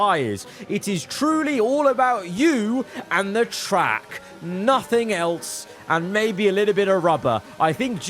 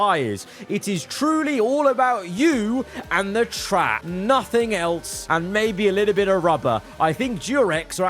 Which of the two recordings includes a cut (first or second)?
second